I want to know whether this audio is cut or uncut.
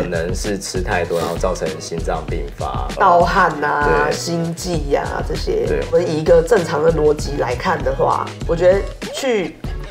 cut